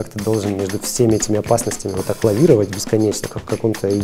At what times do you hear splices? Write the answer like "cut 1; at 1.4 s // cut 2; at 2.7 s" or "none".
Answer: none